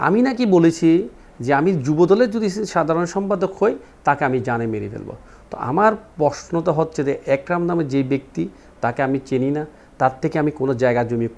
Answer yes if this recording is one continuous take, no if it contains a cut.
yes